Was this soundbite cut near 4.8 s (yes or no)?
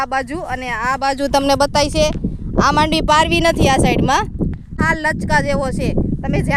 yes